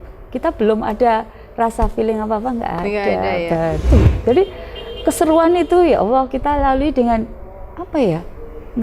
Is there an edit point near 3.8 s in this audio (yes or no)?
yes